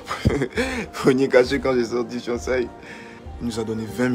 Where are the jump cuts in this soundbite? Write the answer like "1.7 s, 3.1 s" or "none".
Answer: 3.2 s